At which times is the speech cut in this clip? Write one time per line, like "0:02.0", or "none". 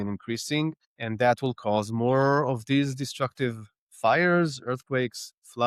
none